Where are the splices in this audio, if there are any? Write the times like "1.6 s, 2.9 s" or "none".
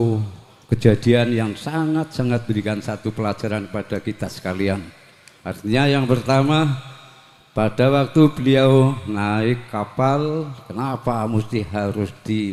none